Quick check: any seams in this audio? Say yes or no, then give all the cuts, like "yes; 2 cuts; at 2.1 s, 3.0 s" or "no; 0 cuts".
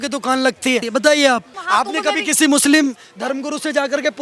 yes; 2 cuts; at 0.9 s, 1.5 s